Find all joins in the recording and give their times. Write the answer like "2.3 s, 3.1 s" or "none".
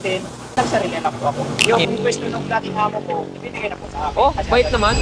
1.5 s